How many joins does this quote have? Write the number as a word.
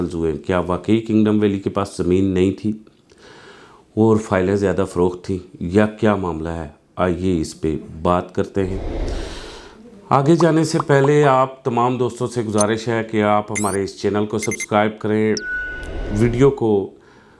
zero